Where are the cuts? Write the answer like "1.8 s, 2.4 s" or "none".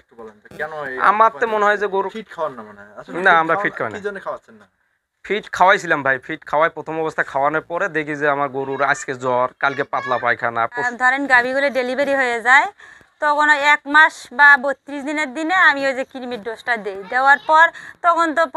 2.1 s, 10.9 s